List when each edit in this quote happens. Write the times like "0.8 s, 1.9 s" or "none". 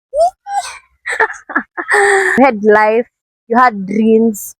2.4 s